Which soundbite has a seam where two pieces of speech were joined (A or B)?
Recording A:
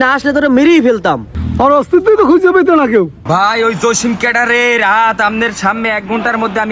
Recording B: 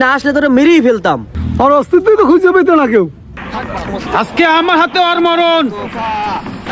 A